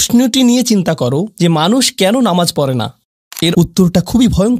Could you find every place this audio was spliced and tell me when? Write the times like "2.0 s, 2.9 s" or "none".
3.5 s